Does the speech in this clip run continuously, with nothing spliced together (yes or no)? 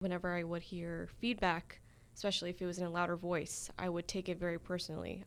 yes